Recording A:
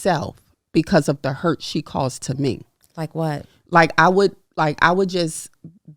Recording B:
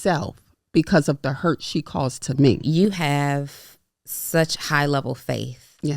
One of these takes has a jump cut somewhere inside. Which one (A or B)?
B